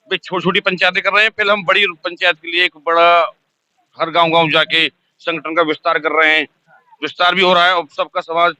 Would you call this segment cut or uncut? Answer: uncut